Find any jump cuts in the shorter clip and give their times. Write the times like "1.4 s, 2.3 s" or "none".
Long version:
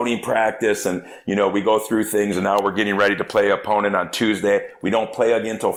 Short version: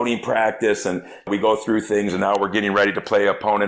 1.3 s